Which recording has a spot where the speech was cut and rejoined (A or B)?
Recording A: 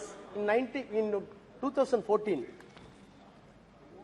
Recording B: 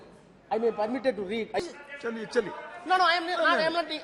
B